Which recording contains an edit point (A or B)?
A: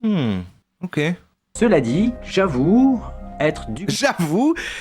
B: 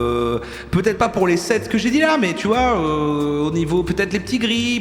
A